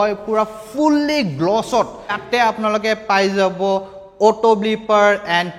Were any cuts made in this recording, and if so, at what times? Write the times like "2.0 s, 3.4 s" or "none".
2.2 s